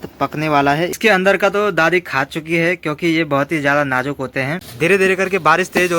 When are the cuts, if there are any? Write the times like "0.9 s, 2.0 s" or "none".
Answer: 0.9 s, 4.7 s